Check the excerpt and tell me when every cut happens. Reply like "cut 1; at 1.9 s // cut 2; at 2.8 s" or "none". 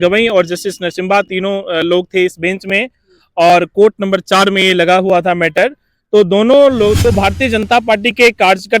cut 1; at 7.0 s